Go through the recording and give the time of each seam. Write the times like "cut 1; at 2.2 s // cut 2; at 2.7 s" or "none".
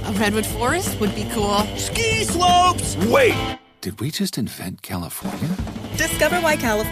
none